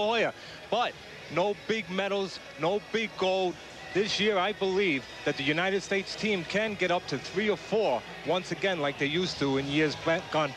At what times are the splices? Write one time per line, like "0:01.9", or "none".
0:02.6